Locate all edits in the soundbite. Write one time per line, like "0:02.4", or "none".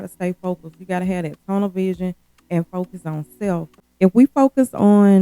0:03.8